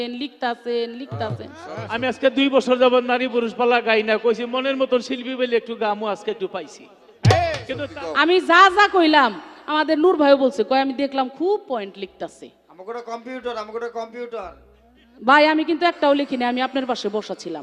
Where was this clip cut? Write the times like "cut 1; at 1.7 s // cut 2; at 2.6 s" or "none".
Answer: cut 1; at 1.8 s // cut 2; at 7.7 s